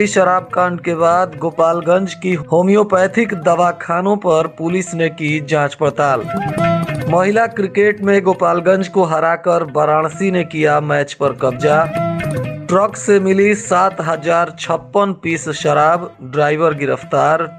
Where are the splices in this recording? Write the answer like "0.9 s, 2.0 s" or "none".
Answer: none